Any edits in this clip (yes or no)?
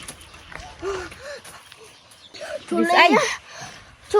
yes